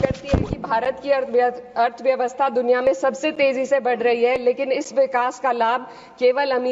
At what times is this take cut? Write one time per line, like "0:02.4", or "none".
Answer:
none

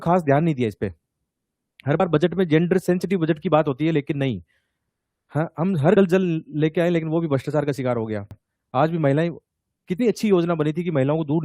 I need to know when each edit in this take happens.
none

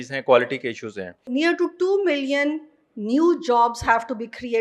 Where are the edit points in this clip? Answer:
0:01.2

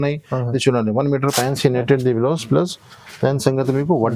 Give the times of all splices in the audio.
0:01.3

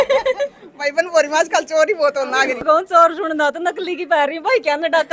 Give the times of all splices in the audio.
0:02.6

